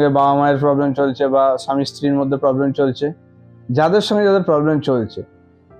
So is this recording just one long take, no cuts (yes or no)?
yes